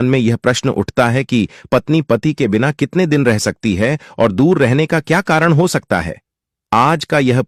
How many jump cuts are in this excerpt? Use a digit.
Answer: 0